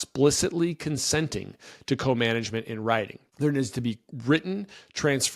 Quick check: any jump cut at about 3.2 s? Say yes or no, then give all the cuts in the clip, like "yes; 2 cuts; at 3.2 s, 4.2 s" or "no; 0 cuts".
yes; 1 cut; at 3.2 s